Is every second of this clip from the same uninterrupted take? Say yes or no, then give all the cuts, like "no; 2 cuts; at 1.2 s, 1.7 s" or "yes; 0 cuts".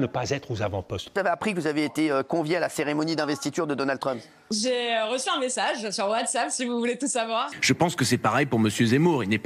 no; 2 cuts; at 1.1 s, 7.6 s